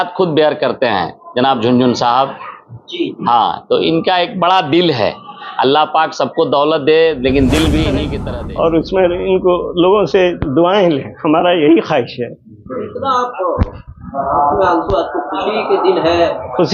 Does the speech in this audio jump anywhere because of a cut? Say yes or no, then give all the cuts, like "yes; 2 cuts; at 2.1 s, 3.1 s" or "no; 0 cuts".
yes; 1 cut; at 8.1 s